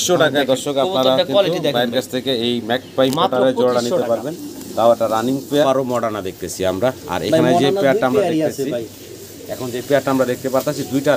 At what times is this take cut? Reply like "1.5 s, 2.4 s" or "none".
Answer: 5.6 s